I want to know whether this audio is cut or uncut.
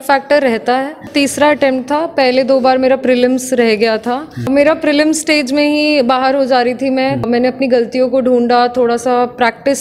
cut